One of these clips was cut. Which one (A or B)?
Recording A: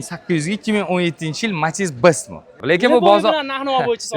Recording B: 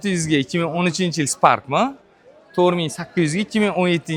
A